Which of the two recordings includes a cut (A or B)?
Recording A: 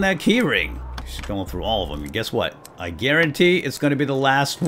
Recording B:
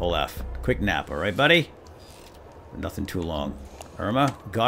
A